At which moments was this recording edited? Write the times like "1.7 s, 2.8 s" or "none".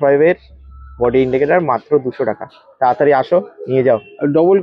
none